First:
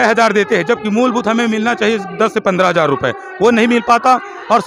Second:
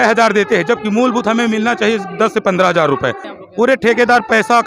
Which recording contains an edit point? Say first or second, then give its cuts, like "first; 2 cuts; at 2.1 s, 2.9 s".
second; 1 cut; at 3.3 s